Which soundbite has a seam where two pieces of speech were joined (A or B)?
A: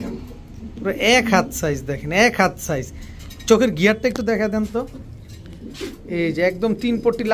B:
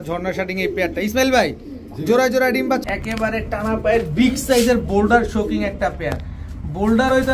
B